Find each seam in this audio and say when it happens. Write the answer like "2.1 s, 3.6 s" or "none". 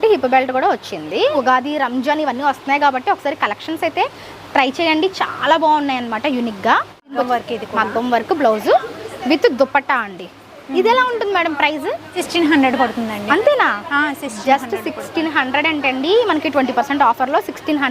1.4 s, 7.1 s, 12.1 s